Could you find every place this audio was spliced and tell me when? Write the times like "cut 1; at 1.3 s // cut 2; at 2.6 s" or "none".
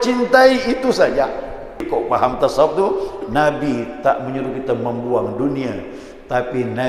cut 1; at 1.9 s

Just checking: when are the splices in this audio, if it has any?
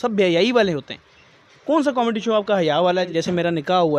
cut 1; at 3.1 s

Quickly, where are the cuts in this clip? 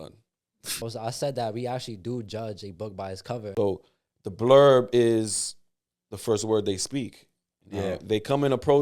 cut 1; at 0.8 s // cut 2; at 3.5 s

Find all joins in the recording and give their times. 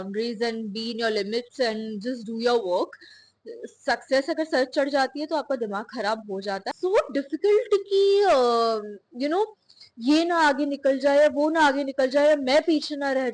cut 1; at 6.7 s

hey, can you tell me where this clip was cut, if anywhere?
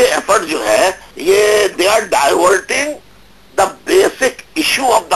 cut 1; at 1.1 s

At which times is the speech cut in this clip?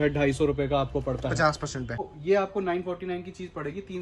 cut 1; at 2.1 s

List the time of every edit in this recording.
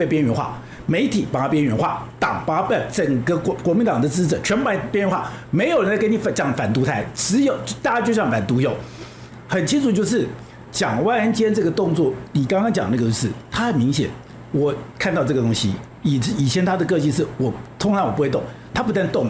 none

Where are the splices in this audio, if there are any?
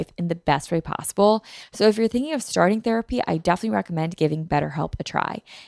cut 1; at 1.6 s

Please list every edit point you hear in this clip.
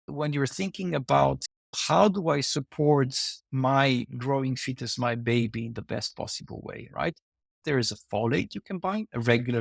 cut 1; at 7.4 s

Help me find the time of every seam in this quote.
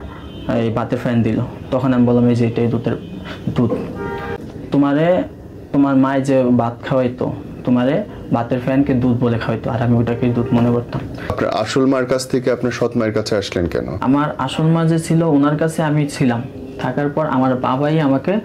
cut 1; at 4.3 s // cut 2; at 11.3 s // cut 3; at 13.9 s

